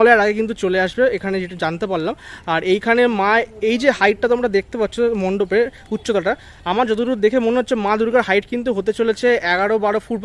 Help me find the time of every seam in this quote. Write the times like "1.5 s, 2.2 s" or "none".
none